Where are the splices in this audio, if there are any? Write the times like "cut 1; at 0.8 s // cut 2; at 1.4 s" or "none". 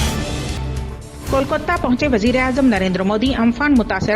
none